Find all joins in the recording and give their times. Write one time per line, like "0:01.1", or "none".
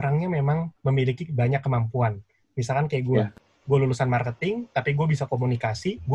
none